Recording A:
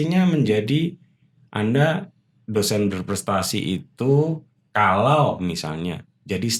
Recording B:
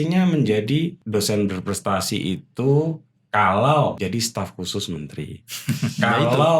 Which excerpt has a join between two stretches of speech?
B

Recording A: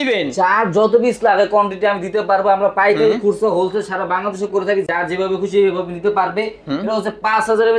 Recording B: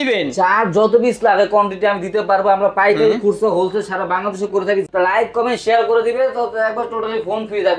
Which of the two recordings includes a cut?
B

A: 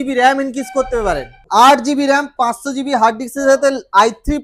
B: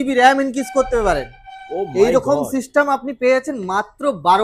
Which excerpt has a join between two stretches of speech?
A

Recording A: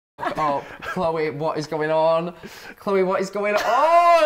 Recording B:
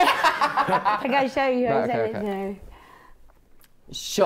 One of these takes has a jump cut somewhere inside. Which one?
B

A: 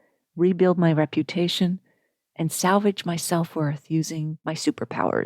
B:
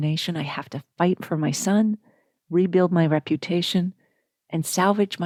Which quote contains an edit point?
A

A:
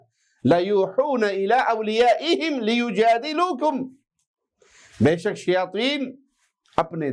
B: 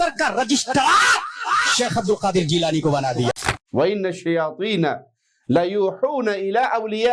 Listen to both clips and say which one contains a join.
B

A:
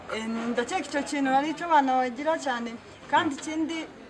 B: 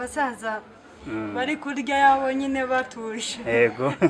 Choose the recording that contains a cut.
B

